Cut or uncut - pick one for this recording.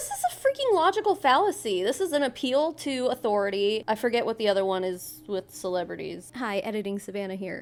uncut